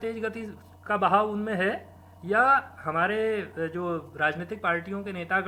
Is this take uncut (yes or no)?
yes